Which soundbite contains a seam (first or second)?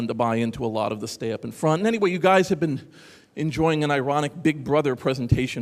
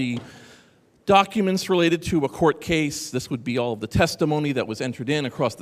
first